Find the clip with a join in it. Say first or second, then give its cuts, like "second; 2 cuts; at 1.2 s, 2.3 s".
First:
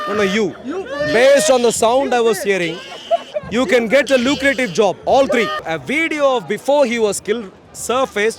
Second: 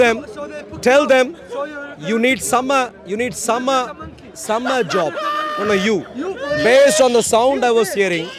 first; 1 cut; at 5.6 s